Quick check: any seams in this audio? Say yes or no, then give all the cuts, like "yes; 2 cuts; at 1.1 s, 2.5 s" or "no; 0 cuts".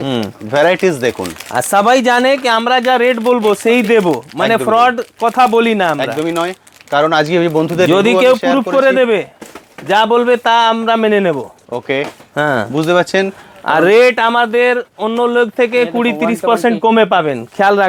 no; 0 cuts